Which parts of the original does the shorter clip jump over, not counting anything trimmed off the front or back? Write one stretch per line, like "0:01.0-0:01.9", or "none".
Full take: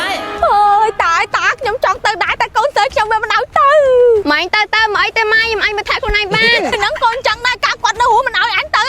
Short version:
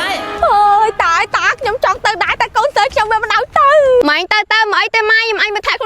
0:04.0-0:04.2